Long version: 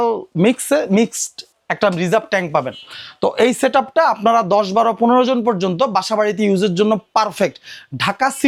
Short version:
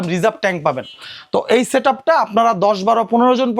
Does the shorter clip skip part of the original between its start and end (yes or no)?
no